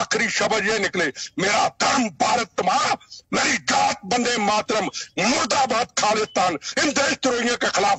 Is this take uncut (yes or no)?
yes